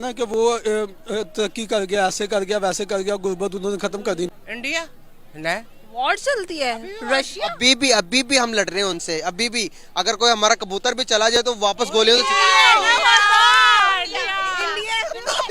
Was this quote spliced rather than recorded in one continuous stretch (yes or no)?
yes